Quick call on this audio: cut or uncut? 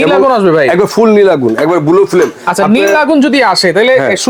uncut